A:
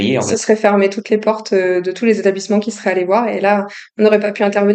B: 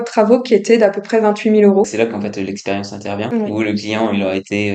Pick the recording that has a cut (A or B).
B